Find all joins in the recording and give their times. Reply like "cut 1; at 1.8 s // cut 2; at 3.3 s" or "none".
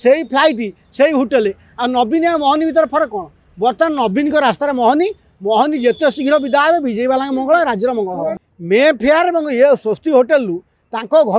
cut 1; at 8.5 s